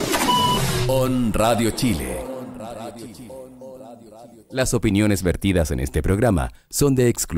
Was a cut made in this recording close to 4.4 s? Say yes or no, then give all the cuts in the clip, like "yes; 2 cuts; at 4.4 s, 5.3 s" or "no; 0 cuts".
yes; 1 cut; at 4.4 s